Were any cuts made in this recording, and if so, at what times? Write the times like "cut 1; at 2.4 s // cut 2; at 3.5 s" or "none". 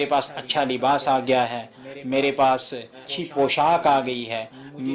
cut 1; at 3.0 s